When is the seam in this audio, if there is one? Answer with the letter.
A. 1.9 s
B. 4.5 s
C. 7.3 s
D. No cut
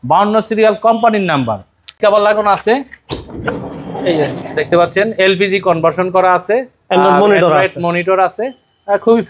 A